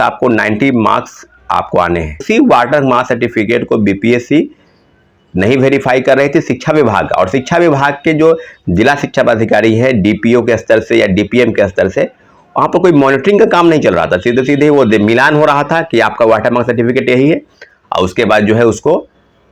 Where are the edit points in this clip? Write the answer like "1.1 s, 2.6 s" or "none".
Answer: 2.2 s